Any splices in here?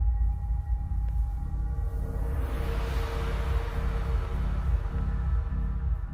no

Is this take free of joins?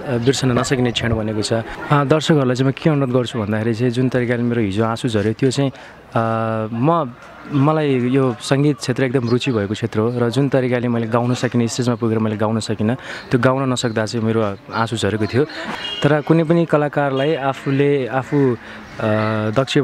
no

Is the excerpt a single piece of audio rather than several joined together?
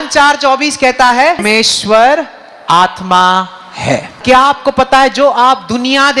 no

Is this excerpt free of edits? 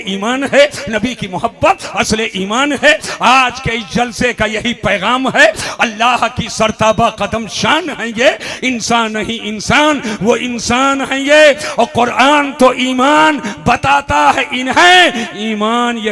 yes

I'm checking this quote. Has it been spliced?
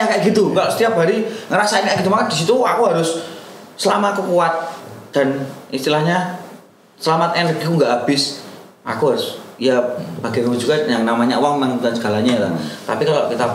no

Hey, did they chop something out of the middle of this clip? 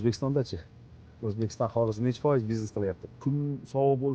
yes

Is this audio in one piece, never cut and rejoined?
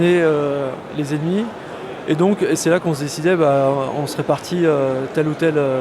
no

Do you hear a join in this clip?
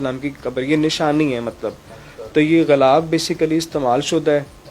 no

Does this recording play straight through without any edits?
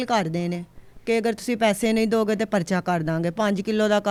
yes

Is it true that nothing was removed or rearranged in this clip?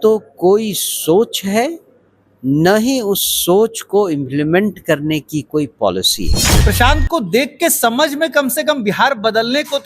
no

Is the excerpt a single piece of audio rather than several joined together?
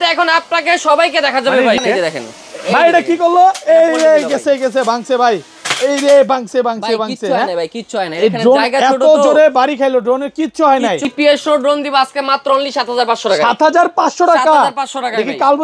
no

